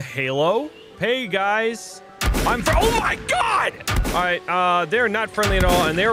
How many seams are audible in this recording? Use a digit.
1